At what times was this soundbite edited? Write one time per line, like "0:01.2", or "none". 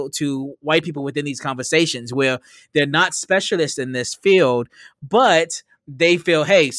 none